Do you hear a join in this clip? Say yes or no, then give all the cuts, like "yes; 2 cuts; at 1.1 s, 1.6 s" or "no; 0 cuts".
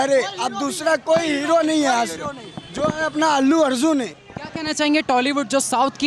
no; 0 cuts